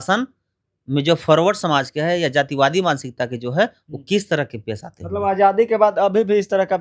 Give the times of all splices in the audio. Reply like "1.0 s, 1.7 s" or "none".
none